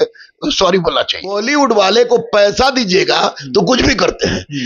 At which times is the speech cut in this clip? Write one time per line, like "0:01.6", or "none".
0:01.4